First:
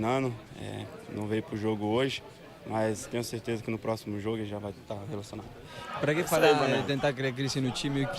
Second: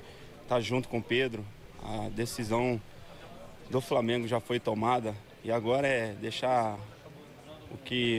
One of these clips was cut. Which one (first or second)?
first